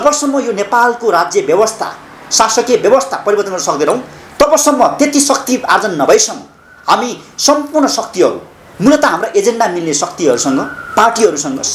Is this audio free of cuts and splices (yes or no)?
yes